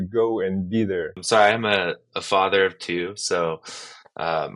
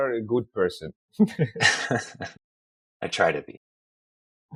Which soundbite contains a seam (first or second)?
first